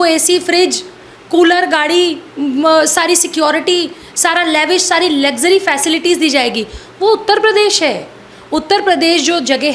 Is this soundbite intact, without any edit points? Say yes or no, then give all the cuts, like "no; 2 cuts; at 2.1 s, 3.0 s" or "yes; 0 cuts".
yes; 0 cuts